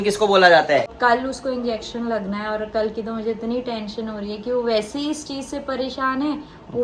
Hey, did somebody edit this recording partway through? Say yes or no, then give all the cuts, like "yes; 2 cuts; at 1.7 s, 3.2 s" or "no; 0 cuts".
yes; 1 cut; at 0.9 s